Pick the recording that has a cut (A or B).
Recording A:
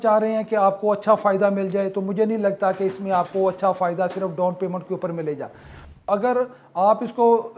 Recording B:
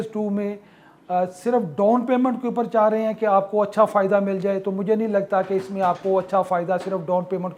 A